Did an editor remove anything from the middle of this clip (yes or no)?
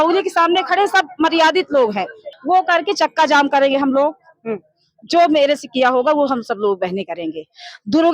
yes